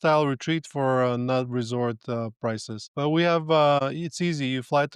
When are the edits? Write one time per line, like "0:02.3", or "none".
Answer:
0:02.8
0:03.8